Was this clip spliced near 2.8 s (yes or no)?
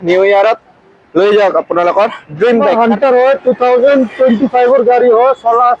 yes